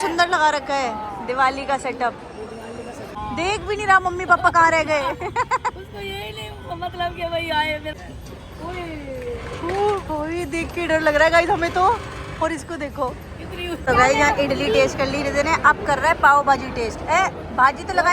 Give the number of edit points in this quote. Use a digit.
3